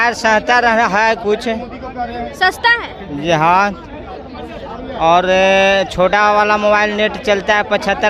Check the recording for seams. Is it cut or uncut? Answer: uncut